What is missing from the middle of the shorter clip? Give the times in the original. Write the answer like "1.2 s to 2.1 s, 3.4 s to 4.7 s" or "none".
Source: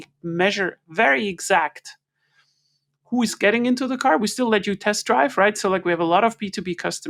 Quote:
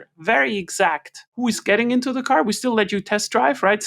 1.9 s to 2.9 s